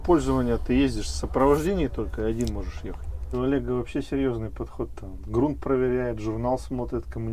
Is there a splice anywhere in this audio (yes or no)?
yes